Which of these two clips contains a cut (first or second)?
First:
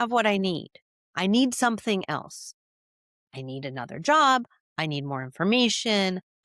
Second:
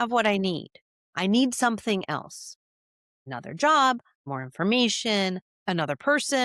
second